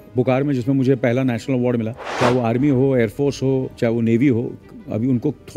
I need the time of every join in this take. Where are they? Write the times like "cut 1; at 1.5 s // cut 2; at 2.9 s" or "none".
cut 1; at 2.0 s // cut 2; at 3.7 s